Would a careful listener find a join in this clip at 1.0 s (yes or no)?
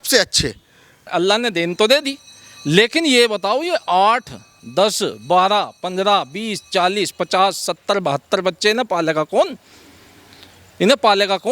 yes